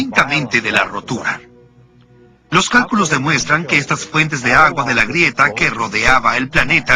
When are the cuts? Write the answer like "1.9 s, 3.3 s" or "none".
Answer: 4.5 s